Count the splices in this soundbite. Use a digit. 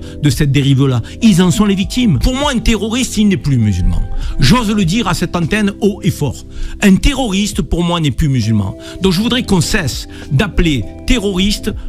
1